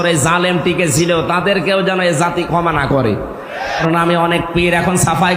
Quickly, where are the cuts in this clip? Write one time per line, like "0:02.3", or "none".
0:03.8

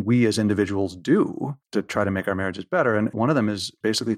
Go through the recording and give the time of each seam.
0:01.6
0:03.2

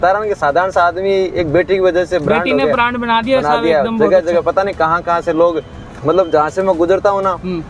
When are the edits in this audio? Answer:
none

